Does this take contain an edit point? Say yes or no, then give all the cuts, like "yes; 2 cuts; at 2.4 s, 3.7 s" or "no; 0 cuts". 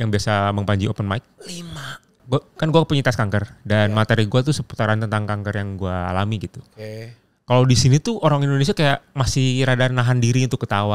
yes; 1 cut; at 2.2 s